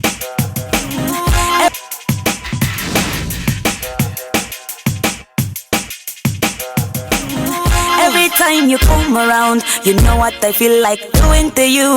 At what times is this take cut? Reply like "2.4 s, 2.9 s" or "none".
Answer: 1.7 s